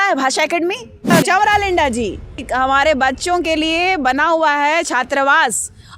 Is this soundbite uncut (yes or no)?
no